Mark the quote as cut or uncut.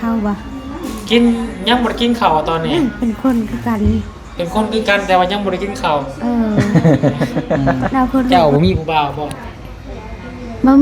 cut